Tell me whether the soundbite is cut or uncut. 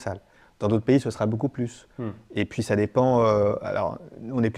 uncut